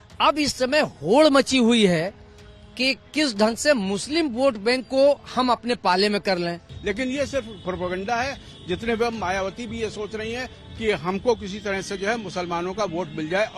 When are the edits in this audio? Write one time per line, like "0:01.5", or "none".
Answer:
0:06.7